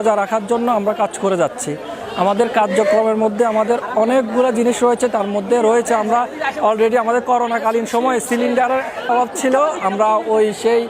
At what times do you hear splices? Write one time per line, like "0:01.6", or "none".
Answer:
none